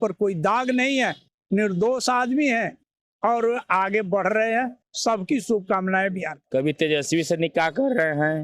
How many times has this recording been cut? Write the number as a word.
one